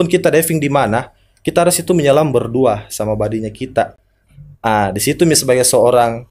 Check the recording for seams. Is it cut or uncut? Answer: uncut